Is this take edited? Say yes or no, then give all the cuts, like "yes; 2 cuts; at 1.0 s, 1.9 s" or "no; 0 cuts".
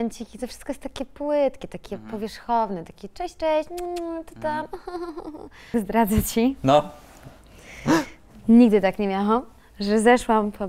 yes; 1 cut; at 5.7 s